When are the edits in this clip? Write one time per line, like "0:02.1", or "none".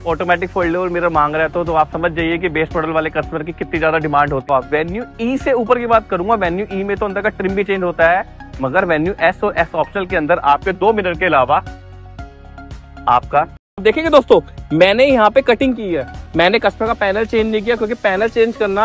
0:04.5
0:13.8
0:16.2